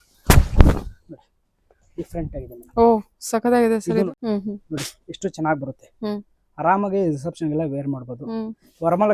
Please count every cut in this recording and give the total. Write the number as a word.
one